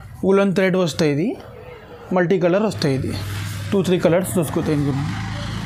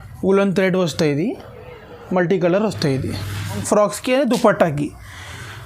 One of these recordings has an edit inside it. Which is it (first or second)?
second